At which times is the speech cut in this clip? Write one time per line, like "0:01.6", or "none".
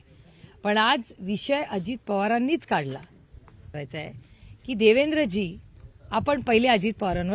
0:03.8